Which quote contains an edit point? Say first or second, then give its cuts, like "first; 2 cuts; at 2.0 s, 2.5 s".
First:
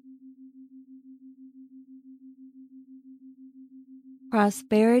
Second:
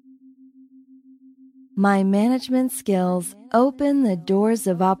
second; 1 cut; at 1.7 s